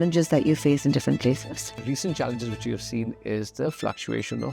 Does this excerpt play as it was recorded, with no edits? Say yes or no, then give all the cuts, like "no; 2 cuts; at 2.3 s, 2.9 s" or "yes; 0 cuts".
no; 1 cut; at 1.7 s